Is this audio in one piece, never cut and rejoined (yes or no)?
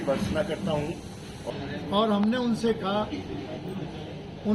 no